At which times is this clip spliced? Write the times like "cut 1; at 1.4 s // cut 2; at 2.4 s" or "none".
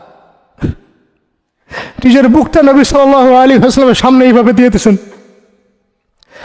none